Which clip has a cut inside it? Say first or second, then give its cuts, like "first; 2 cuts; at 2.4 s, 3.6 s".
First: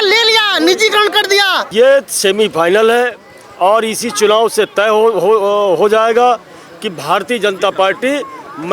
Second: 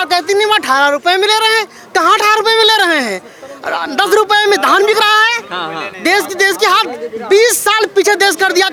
first; 1 cut; at 1.6 s